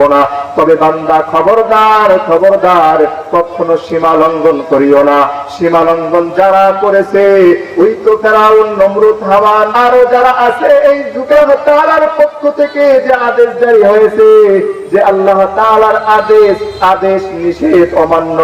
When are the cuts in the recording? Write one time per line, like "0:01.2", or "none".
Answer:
0:09.7
0:11.4

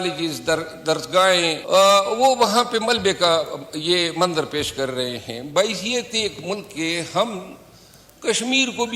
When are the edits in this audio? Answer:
0:01.6

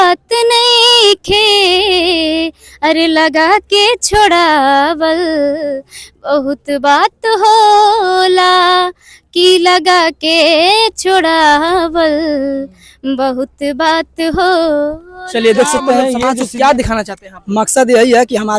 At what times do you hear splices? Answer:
0:16.3

